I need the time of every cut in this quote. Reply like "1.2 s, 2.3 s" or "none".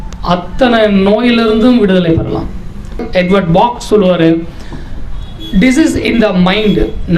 3.0 s